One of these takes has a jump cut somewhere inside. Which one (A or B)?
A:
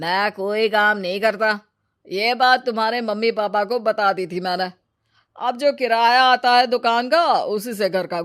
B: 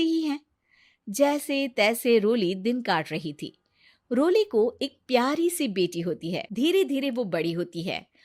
B